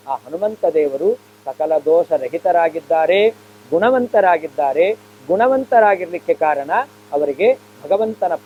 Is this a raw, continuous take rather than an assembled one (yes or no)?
yes